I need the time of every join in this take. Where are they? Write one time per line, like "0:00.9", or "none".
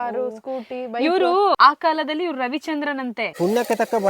0:01.6
0:03.3